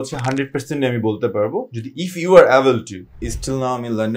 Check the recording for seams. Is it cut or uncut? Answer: cut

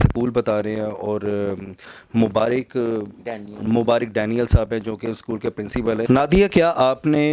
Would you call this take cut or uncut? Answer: cut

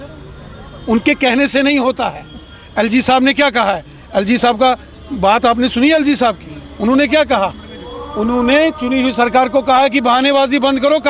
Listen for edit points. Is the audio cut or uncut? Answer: uncut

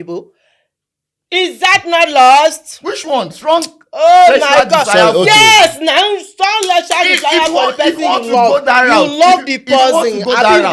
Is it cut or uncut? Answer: uncut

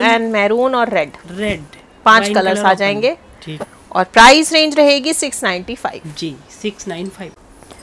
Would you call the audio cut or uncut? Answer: uncut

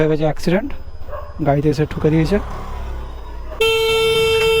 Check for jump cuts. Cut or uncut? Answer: cut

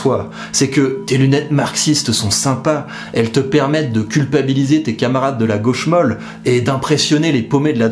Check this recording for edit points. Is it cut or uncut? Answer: cut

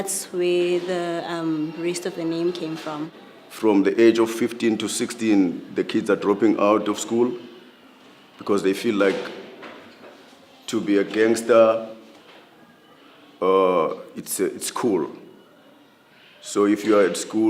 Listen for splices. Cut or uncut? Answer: cut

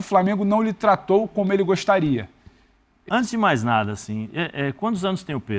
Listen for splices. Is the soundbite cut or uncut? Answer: cut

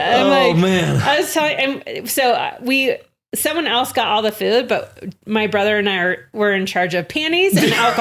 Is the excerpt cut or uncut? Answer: uncut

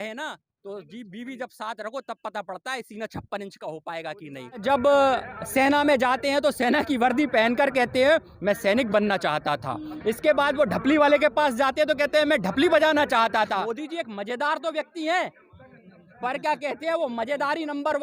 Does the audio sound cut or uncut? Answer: cut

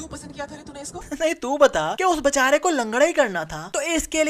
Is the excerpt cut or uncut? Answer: cut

